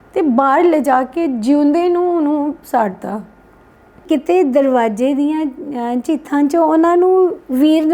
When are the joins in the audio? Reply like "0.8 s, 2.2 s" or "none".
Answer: 4.0 s